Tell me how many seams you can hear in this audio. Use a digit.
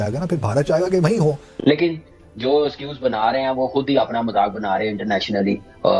1